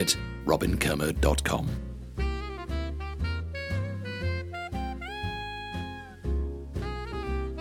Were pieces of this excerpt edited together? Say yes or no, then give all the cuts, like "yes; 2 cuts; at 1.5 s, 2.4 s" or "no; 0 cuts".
yes; 1 cut; at 1.7 s